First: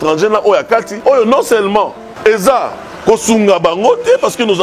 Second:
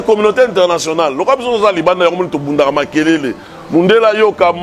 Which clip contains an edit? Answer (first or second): first